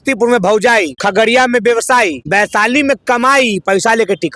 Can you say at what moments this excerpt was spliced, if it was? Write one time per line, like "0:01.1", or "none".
0:00.9
0:02.2